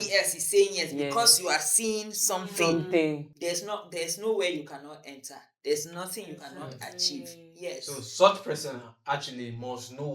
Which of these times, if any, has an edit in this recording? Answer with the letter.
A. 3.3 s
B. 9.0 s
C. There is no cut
A